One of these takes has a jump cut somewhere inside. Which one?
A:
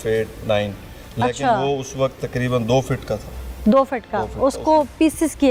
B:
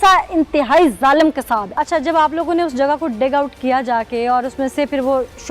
B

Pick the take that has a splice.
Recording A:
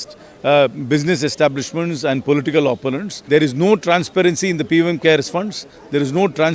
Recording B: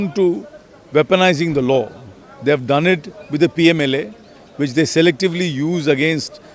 A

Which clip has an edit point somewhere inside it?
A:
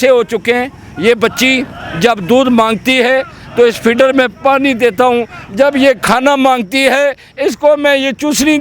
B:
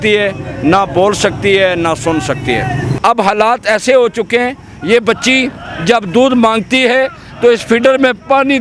B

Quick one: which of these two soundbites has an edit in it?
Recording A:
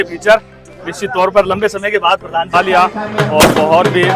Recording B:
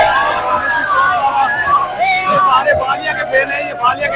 A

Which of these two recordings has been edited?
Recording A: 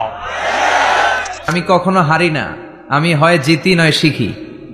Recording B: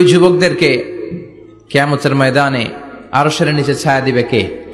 A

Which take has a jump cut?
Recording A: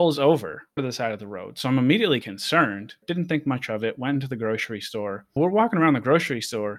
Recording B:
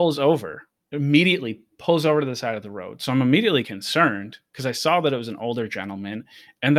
A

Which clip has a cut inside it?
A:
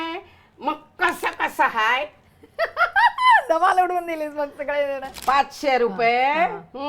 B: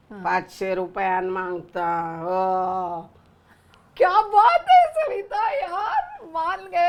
A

